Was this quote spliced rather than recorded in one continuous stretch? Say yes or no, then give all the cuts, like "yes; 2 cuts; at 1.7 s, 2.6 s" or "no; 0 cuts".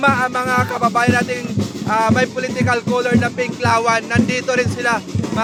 no; 0 cuts